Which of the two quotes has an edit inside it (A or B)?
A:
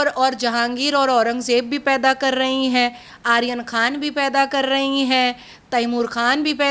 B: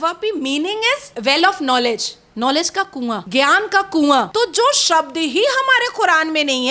B